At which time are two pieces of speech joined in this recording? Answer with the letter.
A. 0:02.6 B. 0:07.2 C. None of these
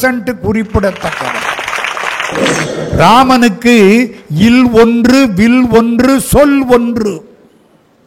A